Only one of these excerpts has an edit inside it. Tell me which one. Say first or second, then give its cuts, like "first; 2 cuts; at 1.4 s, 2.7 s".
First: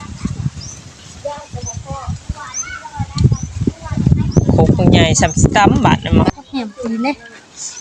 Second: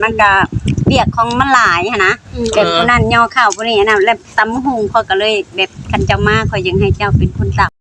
first; 1 cut; at 6.3 s